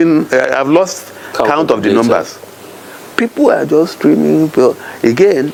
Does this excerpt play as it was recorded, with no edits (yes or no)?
yes